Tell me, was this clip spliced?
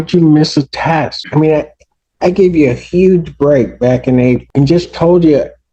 yes; 2 cuts; at 1.2 s, 4.5 s

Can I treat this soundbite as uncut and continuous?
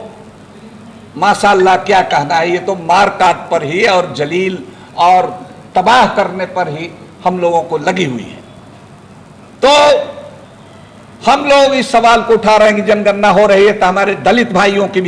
yes; 0 cuts

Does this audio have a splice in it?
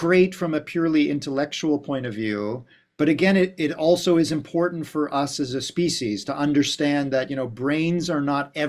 no; 0 cuts

